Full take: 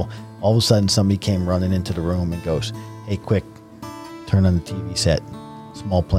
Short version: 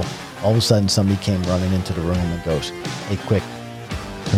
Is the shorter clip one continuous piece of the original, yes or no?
yes